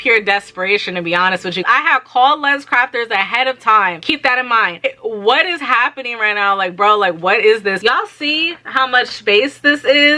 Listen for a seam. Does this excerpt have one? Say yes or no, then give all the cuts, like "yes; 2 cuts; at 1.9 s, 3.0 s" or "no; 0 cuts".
yes; 3 cuts; at 1.6 s, 4.8 s, 7.8 s